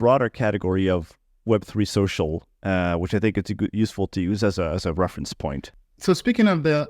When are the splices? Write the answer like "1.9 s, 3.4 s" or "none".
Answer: 5.7 s